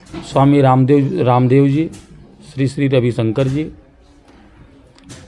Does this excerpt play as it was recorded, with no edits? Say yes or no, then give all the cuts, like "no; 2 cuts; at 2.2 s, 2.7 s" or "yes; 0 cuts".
yes; 0 cuts